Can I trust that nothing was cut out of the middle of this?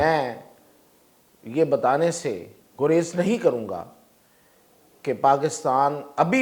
yes; 0 cuts

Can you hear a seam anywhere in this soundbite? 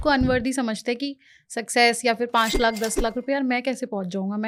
no; 0 cuts

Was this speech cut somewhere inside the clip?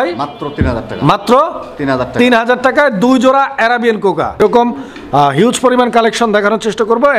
yes; 1 cut; at 4.4 s

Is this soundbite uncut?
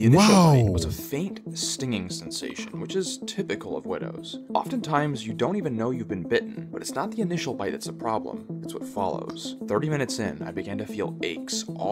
yes; 0 cuts

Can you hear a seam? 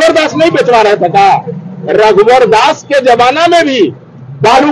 no; 0 cuts

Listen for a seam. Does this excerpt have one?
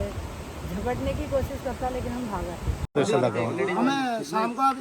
yes; 1 cut; at 2.9 s

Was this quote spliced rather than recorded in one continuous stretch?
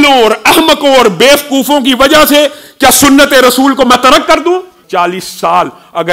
yes; 1 cut; at 4.8 s

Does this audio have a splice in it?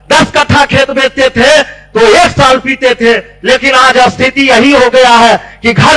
no; 0 cuts

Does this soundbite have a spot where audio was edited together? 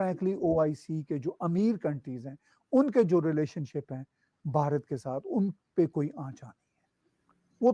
no; 0 cuts

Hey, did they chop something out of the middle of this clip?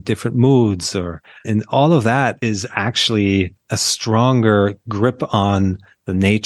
yes; 2 cuts; at 2.4 s, 3.6 s

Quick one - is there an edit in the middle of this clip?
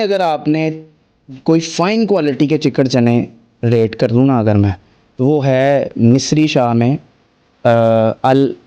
no; 0 cuts

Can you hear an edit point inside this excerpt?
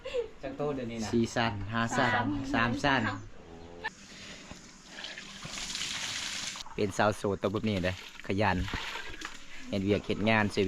yes; 2 cuts; at 3.9 s, 6.6 s

